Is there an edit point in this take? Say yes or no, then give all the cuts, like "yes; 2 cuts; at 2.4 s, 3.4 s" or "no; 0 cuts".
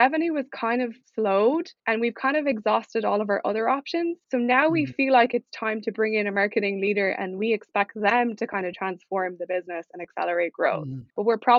no; 0 cuts